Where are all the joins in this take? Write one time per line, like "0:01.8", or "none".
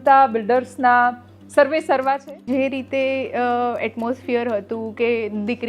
0:02.4